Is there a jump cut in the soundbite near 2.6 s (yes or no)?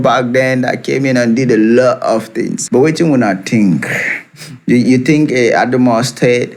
yes